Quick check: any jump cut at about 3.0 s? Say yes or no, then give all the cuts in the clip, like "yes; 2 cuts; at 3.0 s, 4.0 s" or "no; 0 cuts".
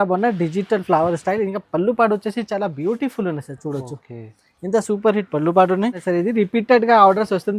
no; 1 cut; at 6.0 s